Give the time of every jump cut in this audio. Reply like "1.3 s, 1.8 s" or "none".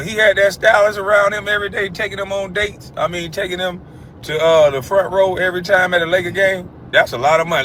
none